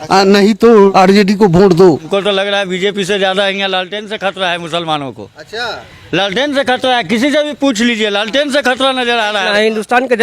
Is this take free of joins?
no; 3 cuts; at 0.9 s, 2.0 s, 9.5 s

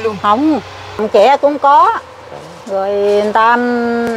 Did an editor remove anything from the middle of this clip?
yes; 1 cut; at 1.0 s

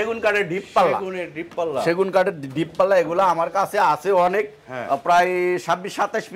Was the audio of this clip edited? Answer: no; 0 cuts

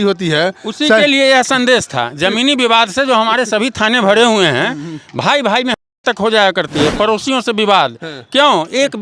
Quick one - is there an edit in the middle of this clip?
no; 0 cuts

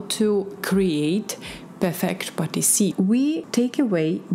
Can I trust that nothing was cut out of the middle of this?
no; 1 cut; at 3.2 s

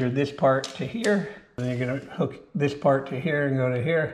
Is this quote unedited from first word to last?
no; 1 cut; at 1.6 s

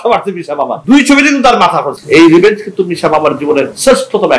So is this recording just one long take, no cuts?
no; 1 cut; at 2.0 s

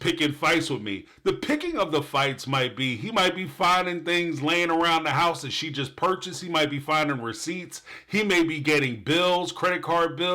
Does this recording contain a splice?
no; 0 cuts

